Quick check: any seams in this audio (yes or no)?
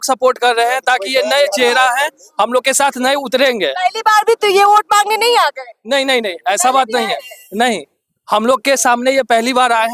no